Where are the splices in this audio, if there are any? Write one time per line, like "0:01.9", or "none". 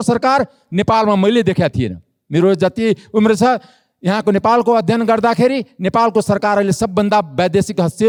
none